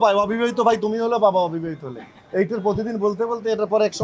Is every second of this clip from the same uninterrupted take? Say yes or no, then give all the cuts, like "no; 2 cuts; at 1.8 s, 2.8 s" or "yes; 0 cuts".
yes; 0 cuts